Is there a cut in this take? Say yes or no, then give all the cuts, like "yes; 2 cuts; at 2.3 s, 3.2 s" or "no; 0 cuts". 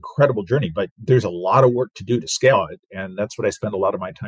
no; 0 cuts